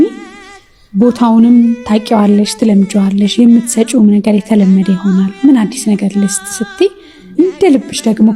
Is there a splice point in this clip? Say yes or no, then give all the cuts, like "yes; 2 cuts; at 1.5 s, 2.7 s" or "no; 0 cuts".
no; 0 cuts